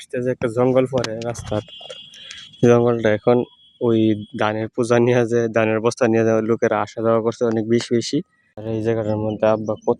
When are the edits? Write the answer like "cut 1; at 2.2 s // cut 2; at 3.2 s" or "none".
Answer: cut 1; at 8.6 s

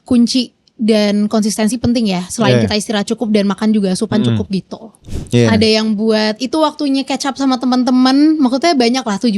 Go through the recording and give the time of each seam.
cut 1; at 5.0 s

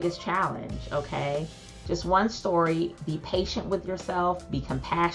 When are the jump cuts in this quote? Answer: none

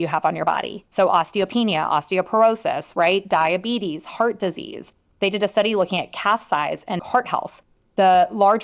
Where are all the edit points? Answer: cut 1; at 7.0 s

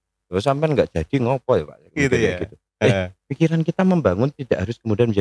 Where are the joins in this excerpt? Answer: none

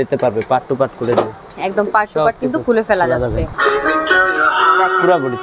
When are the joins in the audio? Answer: cut 1; at 1.5 s // cut 2; at 3.5 s

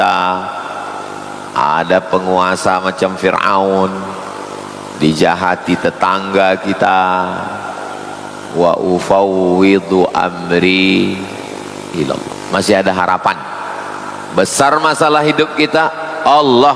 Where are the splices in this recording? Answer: cut 1; at 12.3 s

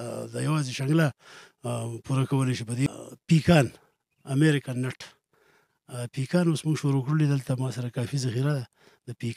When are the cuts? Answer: cut 1; at 2.9 s

